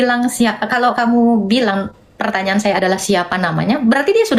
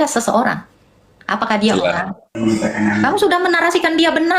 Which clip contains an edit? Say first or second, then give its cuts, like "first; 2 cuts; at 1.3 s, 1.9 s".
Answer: second; 1 cut; at 2.2 s